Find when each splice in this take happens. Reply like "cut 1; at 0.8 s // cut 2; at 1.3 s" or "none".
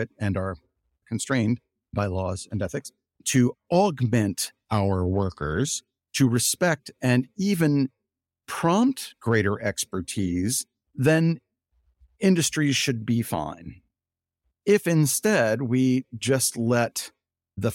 none